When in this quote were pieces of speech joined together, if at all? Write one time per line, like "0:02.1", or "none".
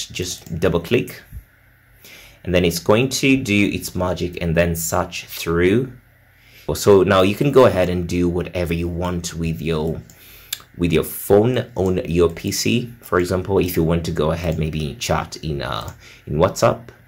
0:06.8

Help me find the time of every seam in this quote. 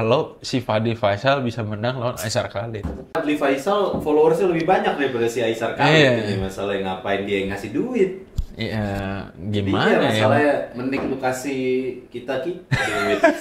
0:03.1

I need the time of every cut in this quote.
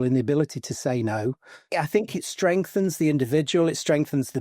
0:01.6

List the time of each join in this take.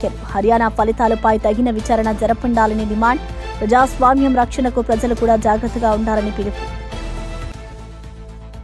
none

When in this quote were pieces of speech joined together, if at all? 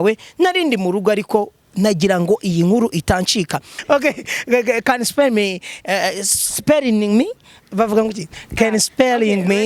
0:03.7

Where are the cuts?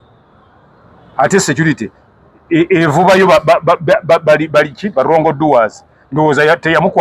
none

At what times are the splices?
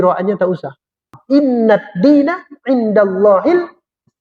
0:01.1

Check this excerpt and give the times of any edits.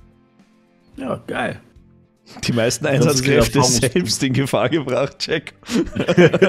none

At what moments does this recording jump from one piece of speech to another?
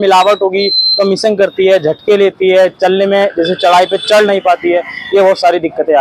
none

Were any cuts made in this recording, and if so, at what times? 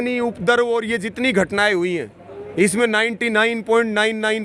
none

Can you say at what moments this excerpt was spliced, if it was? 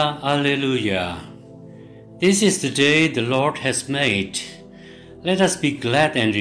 none

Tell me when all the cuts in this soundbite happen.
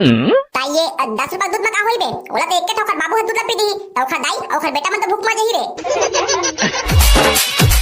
0:06.9

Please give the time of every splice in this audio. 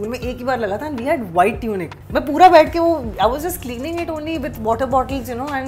0:01.9

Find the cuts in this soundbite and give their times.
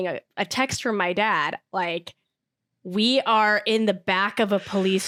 none

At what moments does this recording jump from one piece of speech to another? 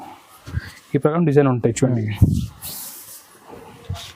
none

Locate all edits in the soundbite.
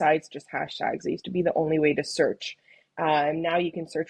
none

